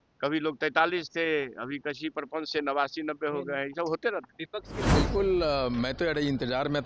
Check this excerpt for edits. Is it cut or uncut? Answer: cut